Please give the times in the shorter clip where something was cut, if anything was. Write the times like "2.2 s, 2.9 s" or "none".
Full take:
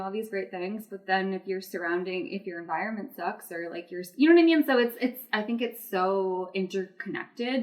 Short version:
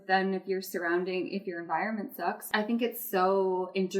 2.5 s